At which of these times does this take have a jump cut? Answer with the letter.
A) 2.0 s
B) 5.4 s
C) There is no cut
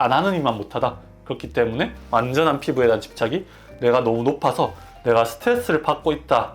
A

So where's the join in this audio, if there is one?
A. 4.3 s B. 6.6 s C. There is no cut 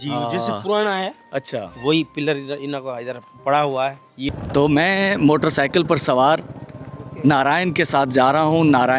A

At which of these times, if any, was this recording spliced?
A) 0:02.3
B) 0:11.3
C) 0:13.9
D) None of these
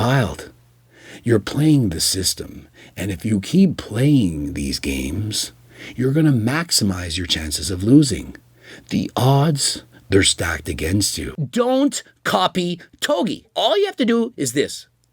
B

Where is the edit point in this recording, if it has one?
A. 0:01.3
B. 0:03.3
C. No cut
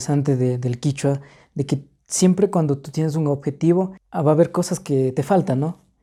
C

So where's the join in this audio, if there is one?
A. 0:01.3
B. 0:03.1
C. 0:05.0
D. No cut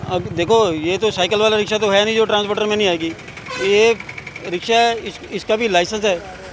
D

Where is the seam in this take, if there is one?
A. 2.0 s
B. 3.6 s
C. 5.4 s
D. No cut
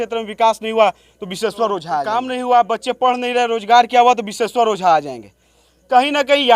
A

